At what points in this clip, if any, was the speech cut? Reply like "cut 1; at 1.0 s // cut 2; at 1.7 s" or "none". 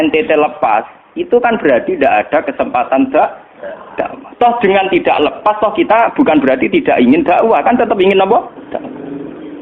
cut 1; at 8.6 s